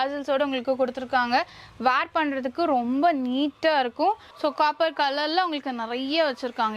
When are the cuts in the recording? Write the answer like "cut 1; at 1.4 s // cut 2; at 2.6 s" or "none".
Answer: cut 1; at 4.3 s